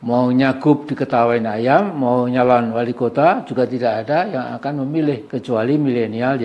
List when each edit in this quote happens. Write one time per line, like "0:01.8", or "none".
none